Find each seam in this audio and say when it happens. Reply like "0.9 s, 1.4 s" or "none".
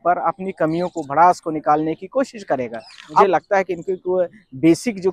3.2 s

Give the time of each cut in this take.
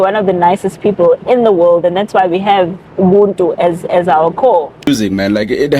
4.9 s

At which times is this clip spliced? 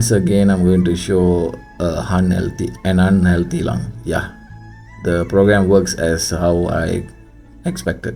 none

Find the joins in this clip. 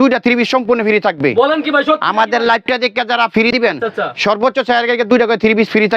3.5 s

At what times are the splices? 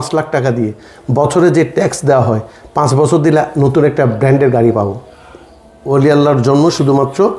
5.8 s

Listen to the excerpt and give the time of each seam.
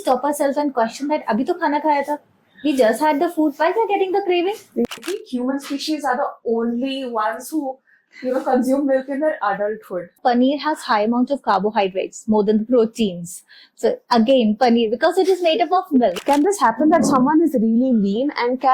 4.8 s, 10.2 s, 16.2 s

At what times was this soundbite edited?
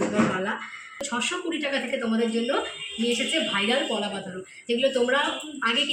1.1 s

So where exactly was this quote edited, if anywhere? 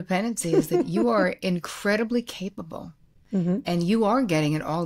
none

